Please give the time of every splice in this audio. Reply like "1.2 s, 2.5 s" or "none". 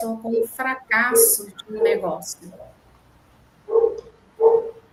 none